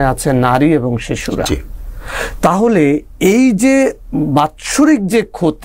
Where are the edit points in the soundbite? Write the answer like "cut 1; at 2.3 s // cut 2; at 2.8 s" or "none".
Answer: none